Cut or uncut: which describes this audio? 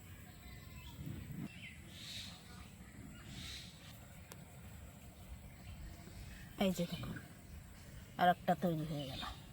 cut